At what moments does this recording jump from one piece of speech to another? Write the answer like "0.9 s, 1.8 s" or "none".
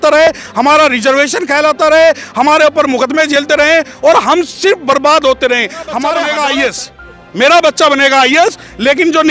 6.2 s